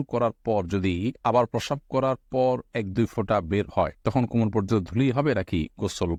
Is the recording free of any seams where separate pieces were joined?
yes; 0 cuts

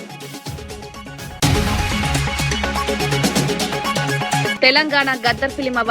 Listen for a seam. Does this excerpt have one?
yes; 1 cut; at 1.2 s

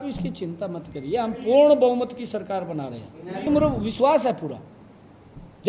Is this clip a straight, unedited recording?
no; 1 cut; at 3.4 s

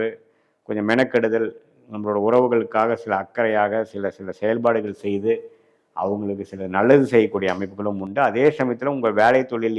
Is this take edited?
no; 0 cuts

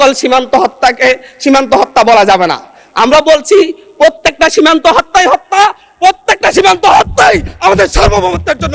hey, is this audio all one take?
yes; 0 cuts

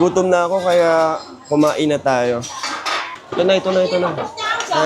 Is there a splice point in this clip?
no; 0 cuts

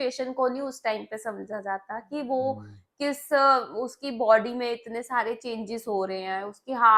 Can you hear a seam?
no; 0 cuts

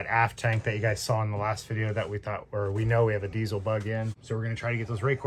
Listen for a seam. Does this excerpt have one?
yes; 1 cut; at 4.2 s

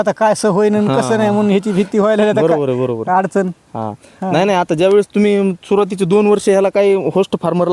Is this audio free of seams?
yes; 0 cuts

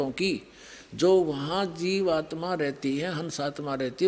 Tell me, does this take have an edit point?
no; 0 cuts

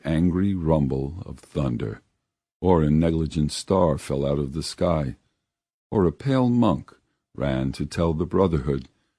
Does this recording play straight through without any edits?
no; 1 cut; at 3.6 s

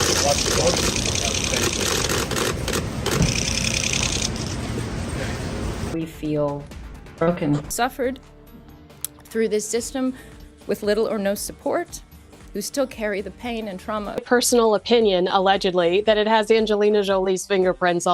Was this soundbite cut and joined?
yes; 3 cuts; at 5.8 s, 7.7 s, 14.0 s

